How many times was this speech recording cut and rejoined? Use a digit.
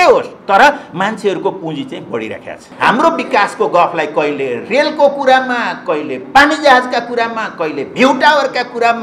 1